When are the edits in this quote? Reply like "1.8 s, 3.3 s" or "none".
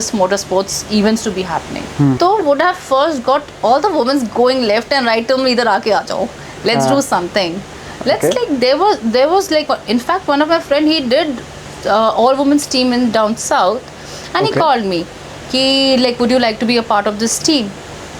2.2 s